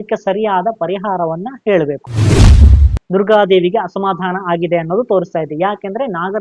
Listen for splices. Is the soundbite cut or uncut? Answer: cut